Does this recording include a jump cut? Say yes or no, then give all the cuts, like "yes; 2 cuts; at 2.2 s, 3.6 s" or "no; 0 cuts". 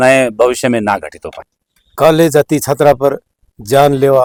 no; 0 cuts